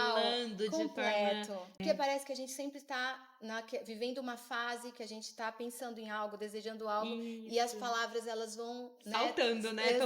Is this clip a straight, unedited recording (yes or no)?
no